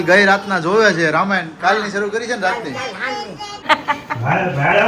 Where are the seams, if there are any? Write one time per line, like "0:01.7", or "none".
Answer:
0:03.6